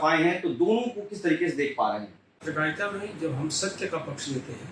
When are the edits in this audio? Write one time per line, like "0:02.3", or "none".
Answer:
0:02.4